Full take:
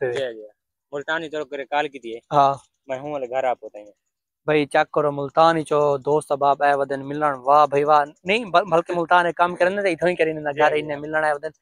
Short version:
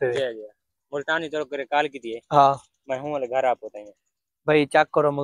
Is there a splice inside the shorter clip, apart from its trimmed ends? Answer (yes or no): no